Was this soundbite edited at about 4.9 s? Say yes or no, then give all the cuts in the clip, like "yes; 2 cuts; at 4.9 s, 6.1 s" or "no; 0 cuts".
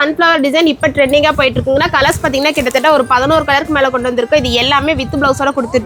no; 0 cuts